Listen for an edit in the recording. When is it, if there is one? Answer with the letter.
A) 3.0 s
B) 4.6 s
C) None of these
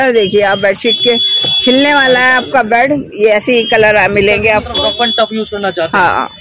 B